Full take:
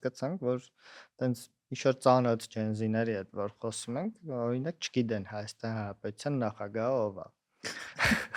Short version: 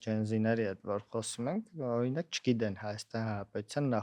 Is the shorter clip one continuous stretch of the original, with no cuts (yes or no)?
yes